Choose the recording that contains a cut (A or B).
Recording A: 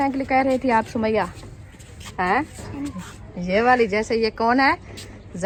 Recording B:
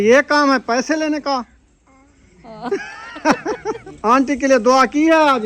B